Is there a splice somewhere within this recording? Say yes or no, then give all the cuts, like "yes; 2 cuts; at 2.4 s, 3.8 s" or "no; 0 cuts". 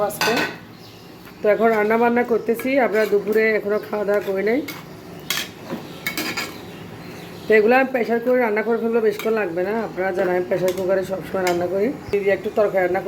no; 0 cuts